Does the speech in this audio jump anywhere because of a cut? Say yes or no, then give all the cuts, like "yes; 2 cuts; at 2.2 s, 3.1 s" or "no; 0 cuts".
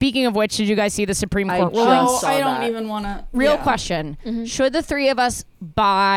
yes; 1 cut; at 3.2 s